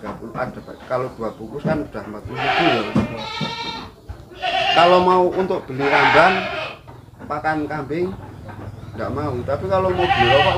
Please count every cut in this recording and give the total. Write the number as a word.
zero